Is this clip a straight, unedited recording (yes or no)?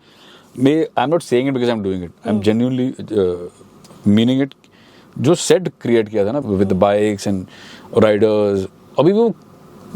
no